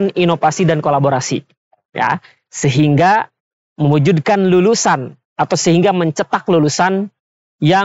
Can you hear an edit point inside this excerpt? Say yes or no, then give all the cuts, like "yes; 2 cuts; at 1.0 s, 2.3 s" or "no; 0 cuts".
no; 0 cuts